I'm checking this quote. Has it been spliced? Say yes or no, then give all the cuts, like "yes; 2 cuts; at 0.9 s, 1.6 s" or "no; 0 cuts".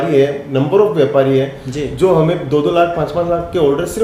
no; 0 cuts